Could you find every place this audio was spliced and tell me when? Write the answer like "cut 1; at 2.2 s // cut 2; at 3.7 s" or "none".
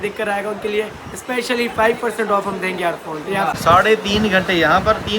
cut 1; at 3.5 s